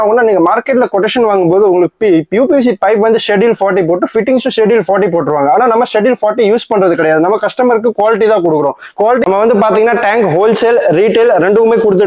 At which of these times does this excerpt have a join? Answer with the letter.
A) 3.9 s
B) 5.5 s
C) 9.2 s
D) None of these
C